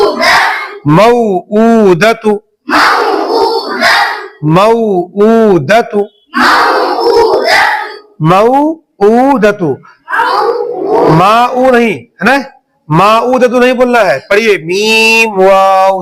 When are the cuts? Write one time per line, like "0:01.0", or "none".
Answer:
none